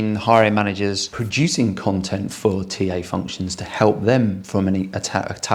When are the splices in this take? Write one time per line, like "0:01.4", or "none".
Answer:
0:01.1